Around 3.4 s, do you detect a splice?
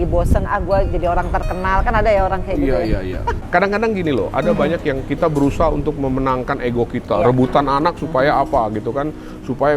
yes; 1 cut; at 3.4 s

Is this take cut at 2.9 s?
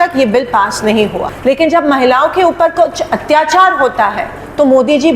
no; 1 cut; at 1.3 s

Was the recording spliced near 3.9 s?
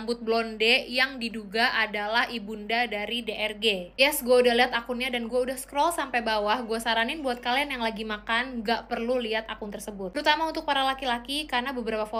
no; 0 cuts

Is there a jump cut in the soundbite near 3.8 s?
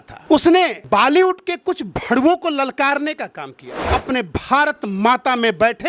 yes; 1 cut; at 3.8 s

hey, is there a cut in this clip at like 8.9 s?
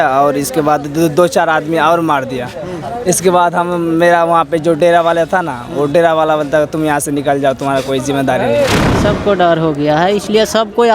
yes; 1 cut; at 8.9 s

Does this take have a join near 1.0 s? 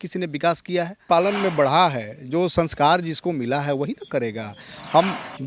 yes; 1 cut; at 1.0 s

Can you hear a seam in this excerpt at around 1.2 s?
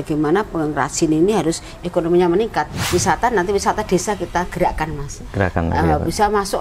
no; 1 cut; at 2.8 s

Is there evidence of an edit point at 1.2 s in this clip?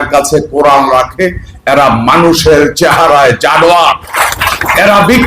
no; 1 cut; at 4.1 s

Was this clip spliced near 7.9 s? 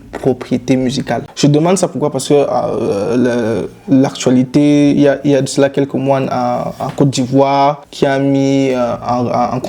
yes; 2 cuts; at 1.3 s, 7.9 s

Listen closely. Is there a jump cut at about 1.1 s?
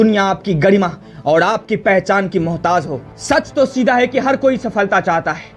no; 1 cut; at 3.1 s

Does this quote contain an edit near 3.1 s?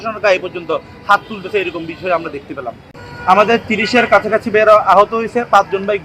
yes; 1 cut; at 3.1 s

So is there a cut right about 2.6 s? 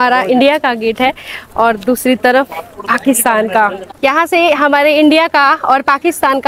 no; 1 cut; at 3.9 s

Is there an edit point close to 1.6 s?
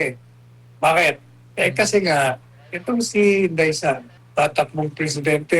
no; 1 cut; at 4.1 s

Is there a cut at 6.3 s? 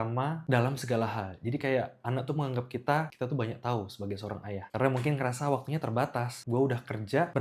no; 1 cut; at 4.7 s

